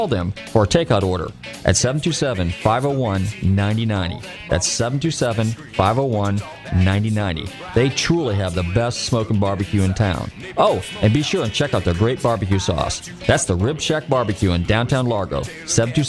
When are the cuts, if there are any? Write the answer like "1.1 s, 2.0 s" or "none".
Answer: none